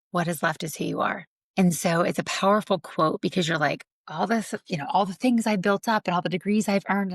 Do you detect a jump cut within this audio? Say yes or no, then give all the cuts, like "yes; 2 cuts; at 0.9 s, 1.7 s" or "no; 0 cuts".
yes; 1 cut; at 1.3 s